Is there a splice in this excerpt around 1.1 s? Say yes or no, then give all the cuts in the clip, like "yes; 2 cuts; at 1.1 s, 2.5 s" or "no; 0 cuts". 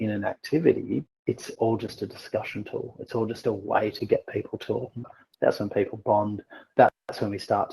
yes; 2 cuts; at 1.1 s, 5.2 s